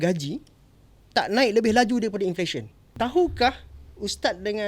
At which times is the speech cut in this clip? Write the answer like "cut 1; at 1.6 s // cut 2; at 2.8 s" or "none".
cut 1; at 2.9 s